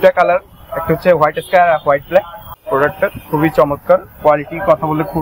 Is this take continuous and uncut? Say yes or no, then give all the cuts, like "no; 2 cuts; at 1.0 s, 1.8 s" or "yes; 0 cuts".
no; 1 cut; at 2.6 s